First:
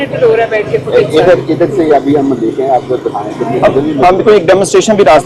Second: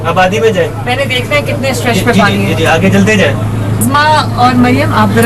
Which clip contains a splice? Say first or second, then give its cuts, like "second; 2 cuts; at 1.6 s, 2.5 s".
second; 1 cut; at 3.8 s